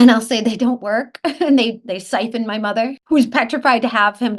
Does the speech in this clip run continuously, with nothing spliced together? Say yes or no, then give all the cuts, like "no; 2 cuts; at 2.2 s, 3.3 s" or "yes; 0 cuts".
no; 1 cut; at 3.0 s